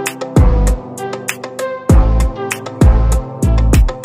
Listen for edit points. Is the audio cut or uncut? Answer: uncut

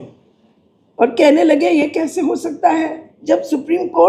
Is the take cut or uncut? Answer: cut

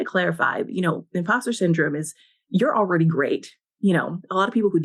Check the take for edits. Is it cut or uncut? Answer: uncut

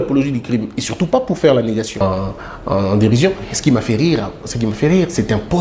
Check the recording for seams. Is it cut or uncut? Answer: cut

